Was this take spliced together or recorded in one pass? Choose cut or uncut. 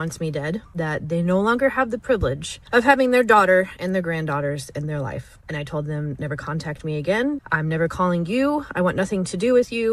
uncut